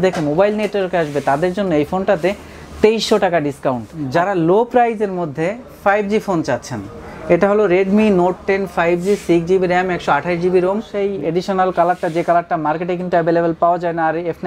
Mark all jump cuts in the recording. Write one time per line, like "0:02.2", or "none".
0:03.9
0:10.9